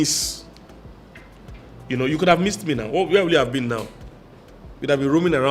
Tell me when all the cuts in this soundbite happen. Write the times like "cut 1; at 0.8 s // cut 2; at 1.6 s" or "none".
none